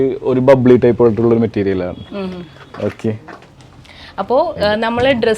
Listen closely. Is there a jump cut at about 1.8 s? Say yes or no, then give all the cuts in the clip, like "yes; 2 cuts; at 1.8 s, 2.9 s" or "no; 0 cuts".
no; 1 cut; at 3.5 s